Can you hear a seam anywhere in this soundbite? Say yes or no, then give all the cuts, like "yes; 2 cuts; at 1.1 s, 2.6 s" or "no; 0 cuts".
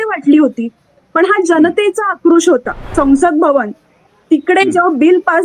yes; 1 cut; at 2.9 s